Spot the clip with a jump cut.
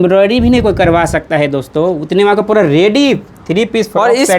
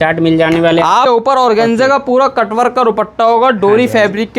second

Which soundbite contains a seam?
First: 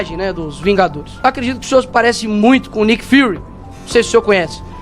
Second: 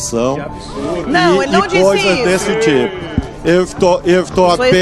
first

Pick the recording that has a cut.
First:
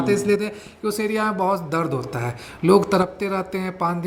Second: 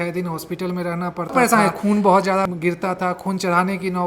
second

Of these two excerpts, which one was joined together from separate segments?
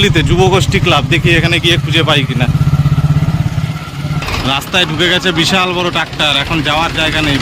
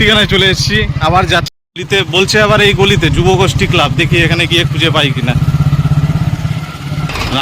second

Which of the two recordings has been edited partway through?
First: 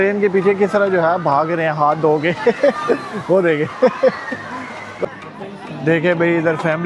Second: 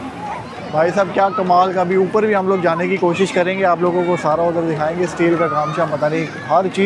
first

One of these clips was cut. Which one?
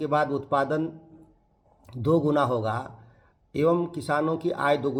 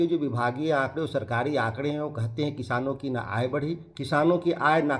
second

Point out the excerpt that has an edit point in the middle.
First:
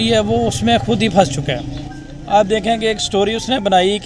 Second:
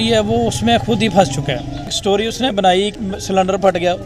second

